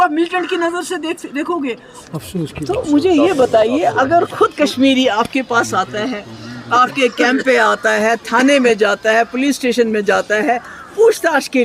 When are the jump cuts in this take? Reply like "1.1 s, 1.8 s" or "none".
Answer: 2.0 s